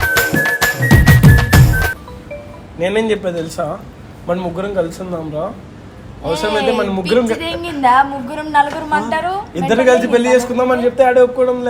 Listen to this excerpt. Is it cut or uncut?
uncut